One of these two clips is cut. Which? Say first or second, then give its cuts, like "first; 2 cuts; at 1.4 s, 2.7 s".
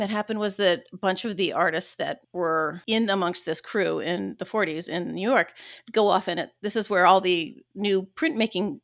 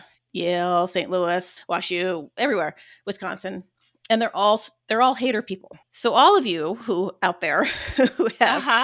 first; 1 cut; at 2.8 s